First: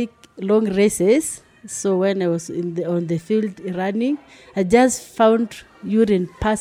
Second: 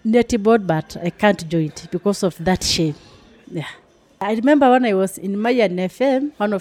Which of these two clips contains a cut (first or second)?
second